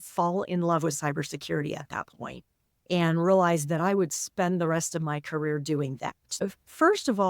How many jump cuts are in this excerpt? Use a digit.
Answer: 1